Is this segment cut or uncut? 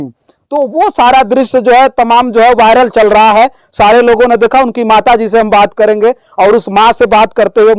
uncut